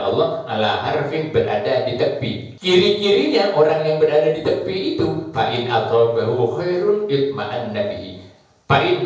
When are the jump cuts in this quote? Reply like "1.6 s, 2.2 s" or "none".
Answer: 2.5 s